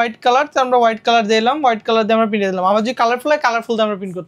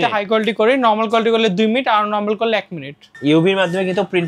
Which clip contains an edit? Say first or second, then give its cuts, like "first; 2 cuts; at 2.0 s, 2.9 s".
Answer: second; 1 cut; at 3.0 s